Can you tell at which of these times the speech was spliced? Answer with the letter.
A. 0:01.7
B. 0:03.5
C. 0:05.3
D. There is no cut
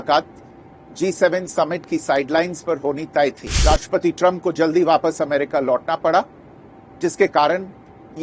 B